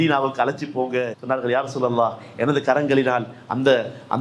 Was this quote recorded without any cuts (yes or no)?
no